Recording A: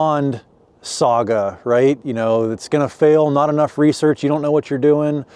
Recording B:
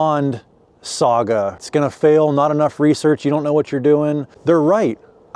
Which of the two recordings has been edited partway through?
B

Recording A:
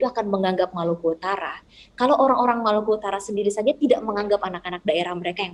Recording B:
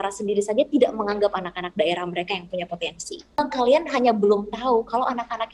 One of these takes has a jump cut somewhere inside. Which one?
B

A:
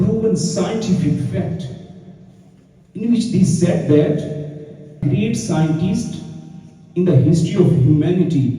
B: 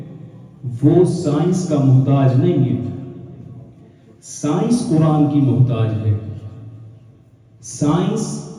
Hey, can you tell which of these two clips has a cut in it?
A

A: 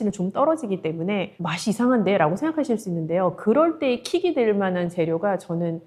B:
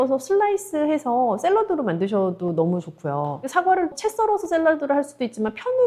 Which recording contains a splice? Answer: B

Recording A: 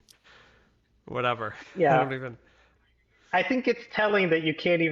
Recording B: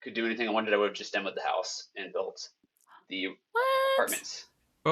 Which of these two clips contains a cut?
A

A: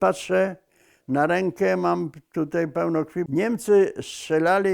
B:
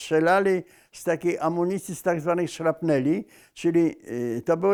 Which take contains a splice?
A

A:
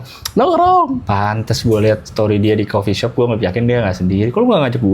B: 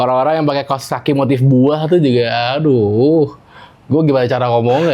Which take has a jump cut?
A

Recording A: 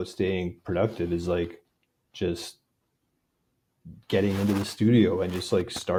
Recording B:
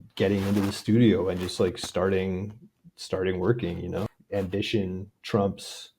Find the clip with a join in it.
B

